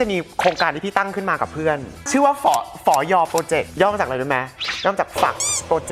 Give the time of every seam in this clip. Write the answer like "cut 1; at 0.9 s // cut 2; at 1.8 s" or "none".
none